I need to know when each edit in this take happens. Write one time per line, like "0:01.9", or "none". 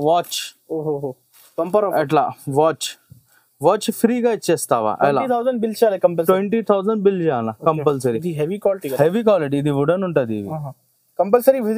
none